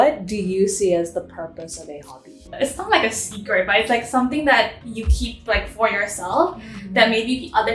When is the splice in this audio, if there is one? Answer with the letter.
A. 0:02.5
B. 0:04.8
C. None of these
A